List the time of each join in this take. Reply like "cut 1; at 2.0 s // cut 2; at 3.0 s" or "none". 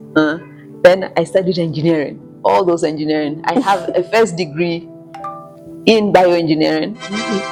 none